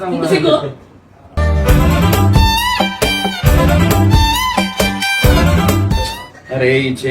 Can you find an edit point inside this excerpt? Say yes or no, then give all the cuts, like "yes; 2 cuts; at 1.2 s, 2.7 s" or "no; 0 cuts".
yes; 1 cut; at 6.0 s